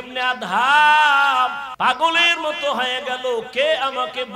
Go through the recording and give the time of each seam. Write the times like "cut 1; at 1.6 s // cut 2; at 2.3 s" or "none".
cut 1; at 1.6 s

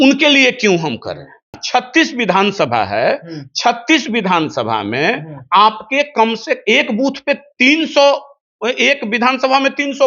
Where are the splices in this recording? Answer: cut 1; at 1.6 s

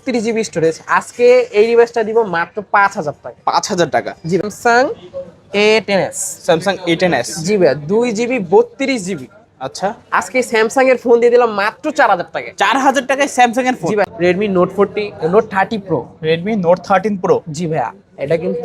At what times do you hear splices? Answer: cut 1; at 4.4 s // cut 2; at 14.1 s

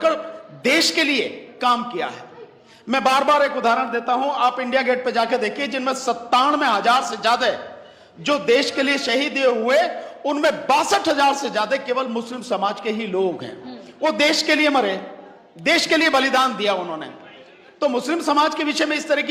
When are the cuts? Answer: none

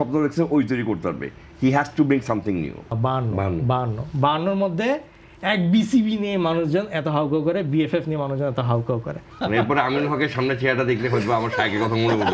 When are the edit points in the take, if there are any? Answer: cut 1; at 2.9 s // cut 2; at 9.2 s

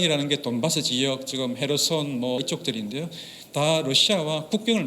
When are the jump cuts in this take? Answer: cut 1; at 2.4 s

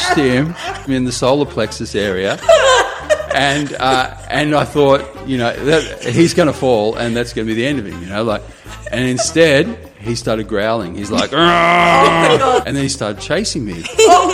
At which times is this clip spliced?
cut 1; at 0.9 s // cut 2; at 3.2 s // cut 3; at 12.6 s

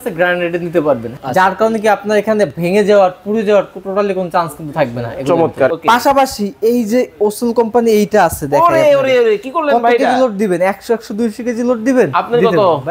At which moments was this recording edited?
cut 1; at 1.1 s // cut 2; at 5.7 s

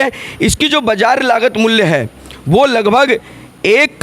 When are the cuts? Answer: none

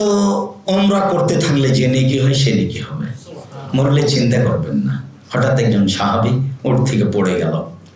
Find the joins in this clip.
none

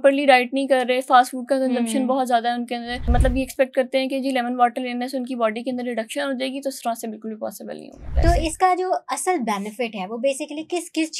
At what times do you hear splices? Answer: cut 1; at 3.1 s // cut 2; at 8.1 s

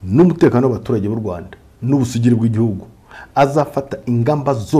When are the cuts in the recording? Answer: none

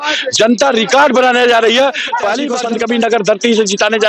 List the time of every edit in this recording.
cut 1; at 2.5 s

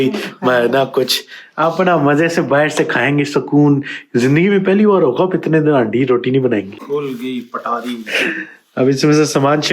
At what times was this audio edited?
cut 1; at 6.9 s

